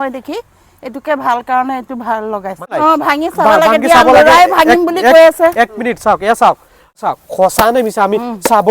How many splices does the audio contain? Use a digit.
2